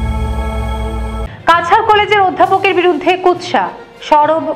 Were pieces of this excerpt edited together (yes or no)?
yes